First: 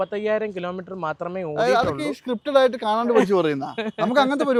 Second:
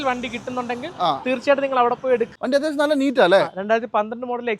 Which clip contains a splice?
second; 1 cut; at 2.3 s

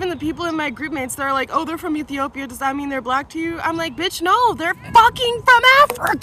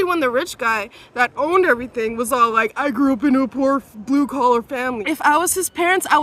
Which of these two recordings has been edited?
second; 1 cut; at 5.0 s

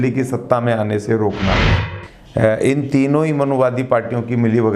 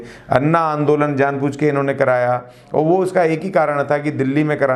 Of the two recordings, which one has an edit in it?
first; 1 cut; at 1.7 s

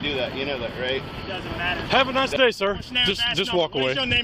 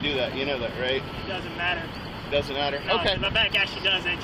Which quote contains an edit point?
first; 1 cut; at 1.7 s

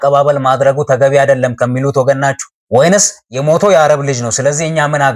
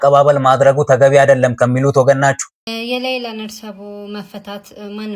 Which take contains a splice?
second; 1 cut; at 2.5 s

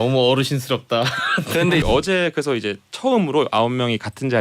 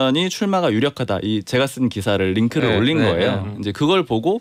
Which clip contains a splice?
first; 1 cut; at 1.8 s

